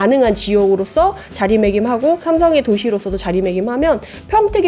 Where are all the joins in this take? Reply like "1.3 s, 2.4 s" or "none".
2.2 s